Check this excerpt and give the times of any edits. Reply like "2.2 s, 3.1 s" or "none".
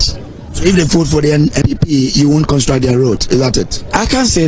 1.6 s